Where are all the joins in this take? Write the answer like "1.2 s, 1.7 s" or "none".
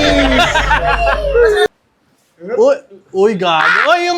1.7 s